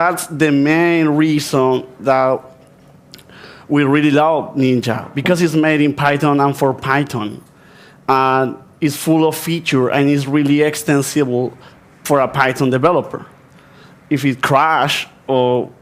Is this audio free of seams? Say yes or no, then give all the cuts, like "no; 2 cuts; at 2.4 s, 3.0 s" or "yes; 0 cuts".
yes; 0 cuts